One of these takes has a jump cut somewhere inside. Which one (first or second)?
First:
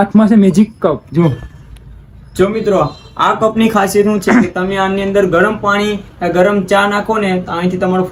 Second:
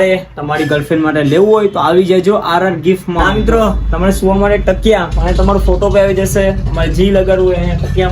second